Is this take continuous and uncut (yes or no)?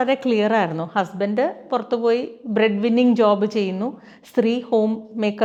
yes